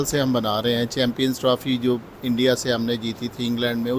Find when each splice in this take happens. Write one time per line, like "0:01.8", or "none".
none